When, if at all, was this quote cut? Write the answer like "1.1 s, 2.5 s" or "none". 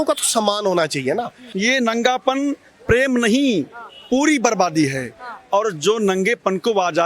1.4 s